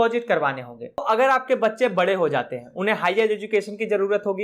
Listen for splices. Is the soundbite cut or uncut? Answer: cut